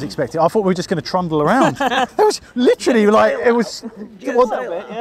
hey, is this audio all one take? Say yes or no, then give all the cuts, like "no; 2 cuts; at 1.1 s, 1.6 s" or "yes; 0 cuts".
no; 1 cut; at 2.1 s